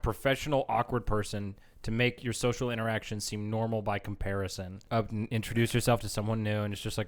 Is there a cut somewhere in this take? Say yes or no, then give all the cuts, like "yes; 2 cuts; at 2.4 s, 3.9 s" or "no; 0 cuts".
yes; 1 cut; at 4.8 s